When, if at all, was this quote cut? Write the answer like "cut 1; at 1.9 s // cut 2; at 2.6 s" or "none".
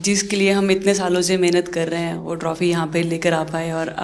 none